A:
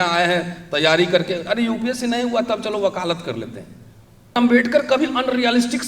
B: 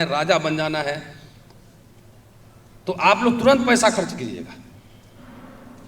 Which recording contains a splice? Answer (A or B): A